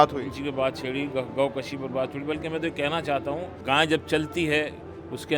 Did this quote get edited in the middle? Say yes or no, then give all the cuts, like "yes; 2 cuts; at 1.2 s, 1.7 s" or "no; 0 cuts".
yes; 1 cut; at 3.6 s